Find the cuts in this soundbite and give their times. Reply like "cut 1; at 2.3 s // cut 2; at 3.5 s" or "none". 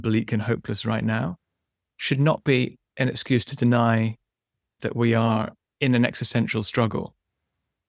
cut 1; at 4.8 s // cut 2; at 5.6 s